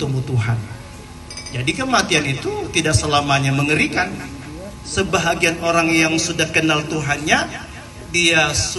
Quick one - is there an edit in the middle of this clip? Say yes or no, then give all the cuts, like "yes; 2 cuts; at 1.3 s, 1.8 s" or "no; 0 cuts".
yes; 1 cut; at 1.2 s